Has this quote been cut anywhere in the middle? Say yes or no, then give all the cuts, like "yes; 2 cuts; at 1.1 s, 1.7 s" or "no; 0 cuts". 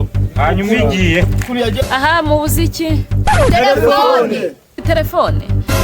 yes; 1 cut; at 1.8 s